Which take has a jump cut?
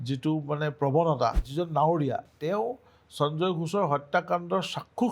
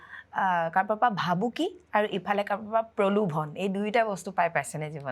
first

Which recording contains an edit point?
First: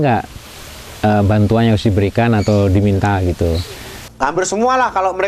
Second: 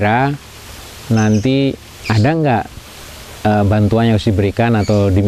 first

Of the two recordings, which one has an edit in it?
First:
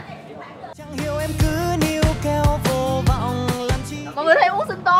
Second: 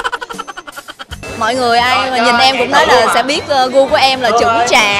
second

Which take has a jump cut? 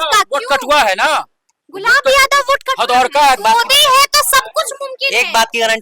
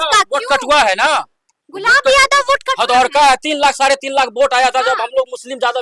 first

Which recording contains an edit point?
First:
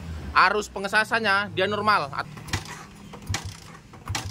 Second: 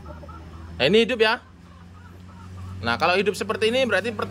first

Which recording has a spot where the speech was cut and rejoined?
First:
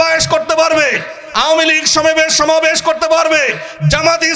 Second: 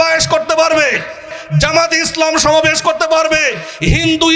second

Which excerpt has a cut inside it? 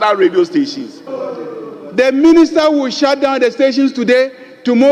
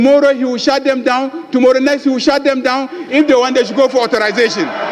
first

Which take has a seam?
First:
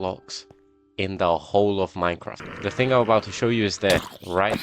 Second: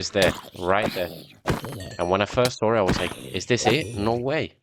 first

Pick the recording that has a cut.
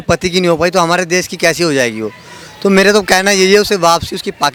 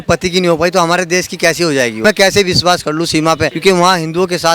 second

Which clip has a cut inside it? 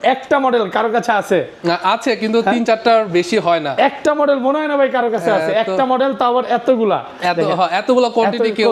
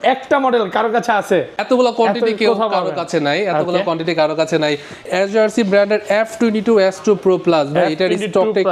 second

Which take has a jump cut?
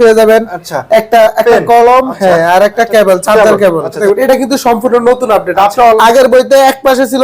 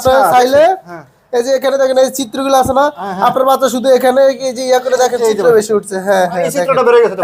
first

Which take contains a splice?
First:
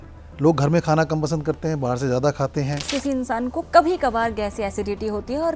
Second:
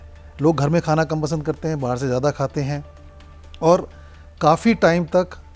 first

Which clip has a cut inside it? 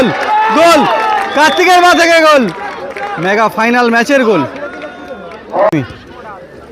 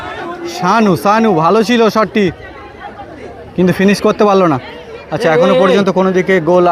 first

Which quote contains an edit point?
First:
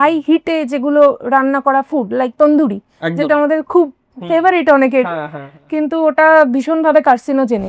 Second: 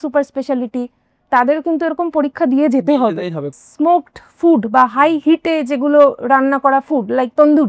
second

